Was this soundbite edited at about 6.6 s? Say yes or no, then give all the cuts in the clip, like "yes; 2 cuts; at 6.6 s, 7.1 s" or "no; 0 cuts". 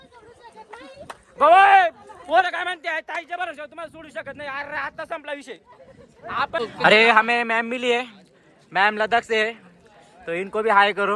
yes; 1 cut; at 6.6 s